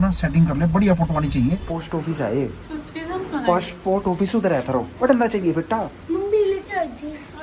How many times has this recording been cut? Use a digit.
2